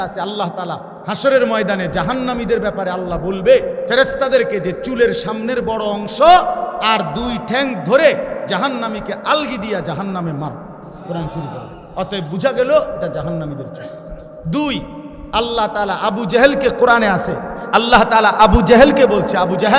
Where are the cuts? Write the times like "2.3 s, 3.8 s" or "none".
0.9 s, 3.8 s, 6.8 s, 8.5 s, 10.9 s, 17.5 s